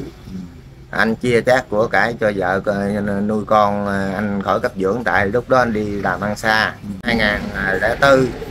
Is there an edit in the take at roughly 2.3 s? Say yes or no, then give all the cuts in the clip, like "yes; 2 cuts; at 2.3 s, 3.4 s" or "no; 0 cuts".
no; 1 cut; at 7.1 s